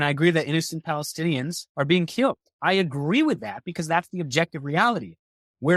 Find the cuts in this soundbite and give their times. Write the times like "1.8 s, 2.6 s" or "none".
1.6 s, 2.5 s